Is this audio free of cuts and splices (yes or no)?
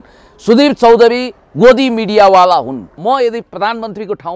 no